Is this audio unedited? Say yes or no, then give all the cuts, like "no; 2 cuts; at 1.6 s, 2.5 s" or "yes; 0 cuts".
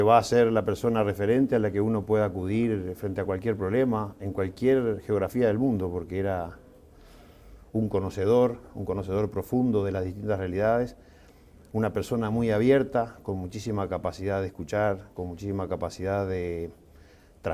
yes; 0 cuts